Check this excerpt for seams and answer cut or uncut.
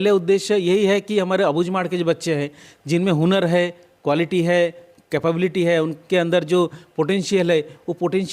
uncut